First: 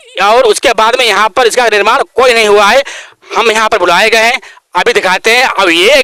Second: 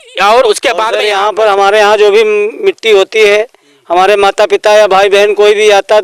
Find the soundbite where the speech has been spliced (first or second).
second